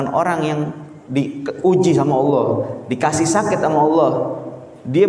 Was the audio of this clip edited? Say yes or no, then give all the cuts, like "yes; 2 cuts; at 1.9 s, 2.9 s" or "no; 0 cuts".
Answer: no; 0 cuts